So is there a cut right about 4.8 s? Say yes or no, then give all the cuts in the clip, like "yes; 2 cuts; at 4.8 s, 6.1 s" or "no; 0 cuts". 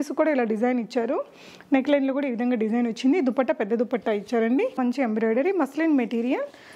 yes; 1 cut; at 4.8 s